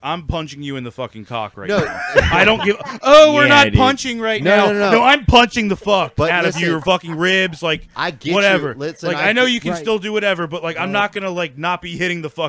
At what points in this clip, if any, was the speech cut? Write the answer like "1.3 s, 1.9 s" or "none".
none